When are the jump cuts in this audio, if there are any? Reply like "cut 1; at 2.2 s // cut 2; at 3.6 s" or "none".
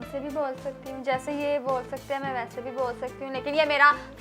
none